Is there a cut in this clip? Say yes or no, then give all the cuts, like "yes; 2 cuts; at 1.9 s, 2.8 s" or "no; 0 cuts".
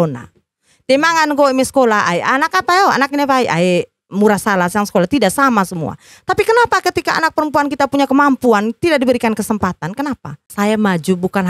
yes; 1 cut; at 10.5 s